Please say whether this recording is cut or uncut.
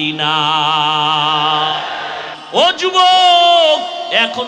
cut